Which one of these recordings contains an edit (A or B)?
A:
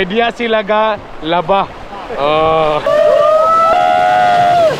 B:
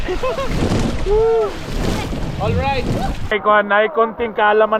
A